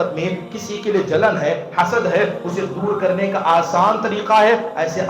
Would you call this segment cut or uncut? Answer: uncut